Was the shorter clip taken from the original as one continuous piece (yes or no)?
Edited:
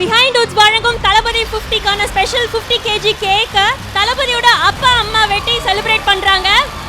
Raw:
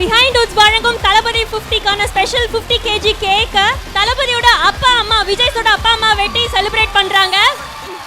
no